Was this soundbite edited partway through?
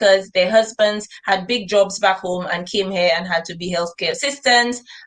no; 0 cuts

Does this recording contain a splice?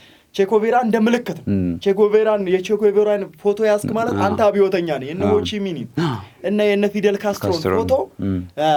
no; 0 cuts

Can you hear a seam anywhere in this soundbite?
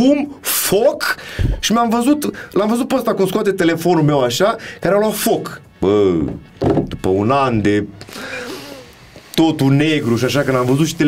no; 0 cuts

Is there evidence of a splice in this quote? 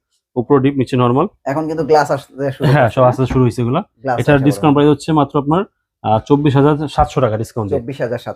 no; 0 cuts

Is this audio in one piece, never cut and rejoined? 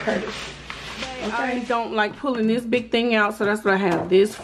no; 1 cut; at 1.5 s

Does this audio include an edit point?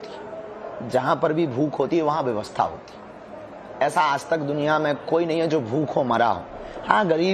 no; 0 cuts

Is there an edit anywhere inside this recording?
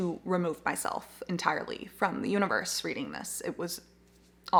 no; 0 cuts

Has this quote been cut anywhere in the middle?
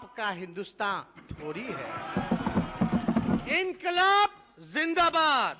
yes; 1 cut; at 3.4 s

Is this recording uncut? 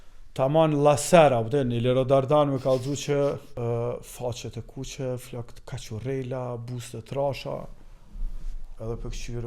no; 1 cut; at 3.5 s

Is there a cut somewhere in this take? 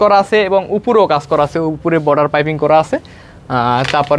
no; 0 cuts

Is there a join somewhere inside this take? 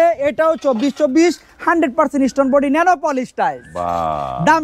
no; 0 cuts

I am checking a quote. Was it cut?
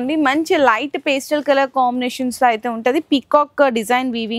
no; 0 cuts

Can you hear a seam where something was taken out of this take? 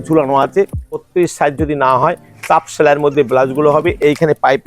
yes; 1 cut; at 1.0 s

